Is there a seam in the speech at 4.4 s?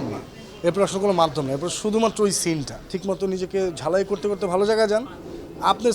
no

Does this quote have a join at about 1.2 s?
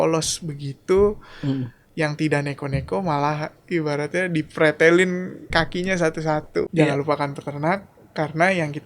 no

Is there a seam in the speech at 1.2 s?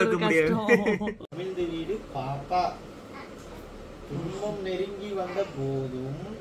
yes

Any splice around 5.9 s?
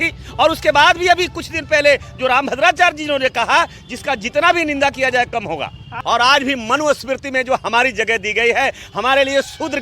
yes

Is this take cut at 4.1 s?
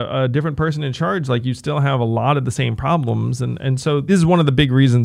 yes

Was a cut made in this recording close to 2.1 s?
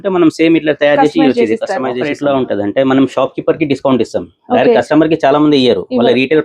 yes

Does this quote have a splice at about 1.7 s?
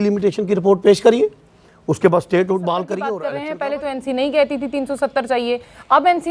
no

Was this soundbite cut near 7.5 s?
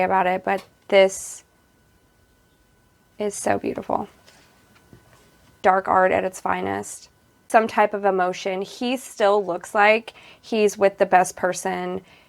yes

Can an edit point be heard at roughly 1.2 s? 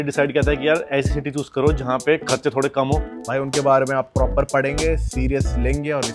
no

